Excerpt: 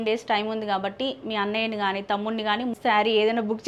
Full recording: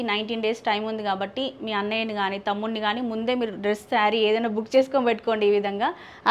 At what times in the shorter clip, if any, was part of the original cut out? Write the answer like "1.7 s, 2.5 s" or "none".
2.8 s